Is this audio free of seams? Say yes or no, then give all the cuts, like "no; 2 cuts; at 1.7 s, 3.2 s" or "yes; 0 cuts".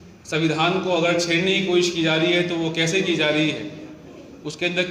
yes; 0 cuts